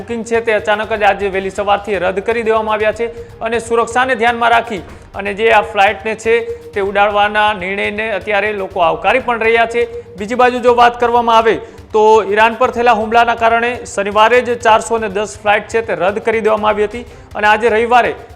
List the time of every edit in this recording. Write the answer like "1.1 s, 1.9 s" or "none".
none